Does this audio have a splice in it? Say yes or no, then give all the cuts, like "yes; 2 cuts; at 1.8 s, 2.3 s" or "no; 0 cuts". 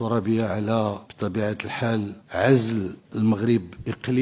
yes; 3 cuts; at 1.1 s, 2.2 s, 3.0 s